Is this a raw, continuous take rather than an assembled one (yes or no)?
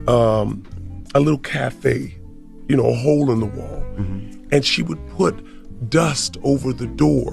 yes